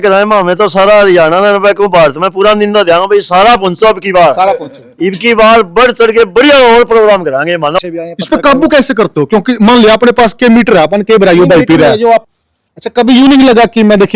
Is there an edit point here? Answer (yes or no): yes